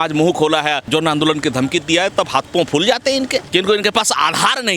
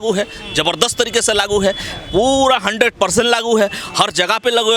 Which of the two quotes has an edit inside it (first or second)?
first